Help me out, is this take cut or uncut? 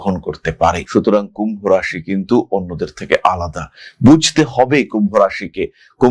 uncut